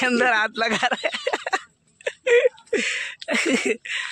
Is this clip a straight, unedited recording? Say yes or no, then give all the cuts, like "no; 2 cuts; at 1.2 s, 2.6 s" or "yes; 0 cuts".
yes; 0 cuts